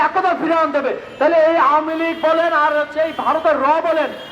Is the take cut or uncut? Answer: uncut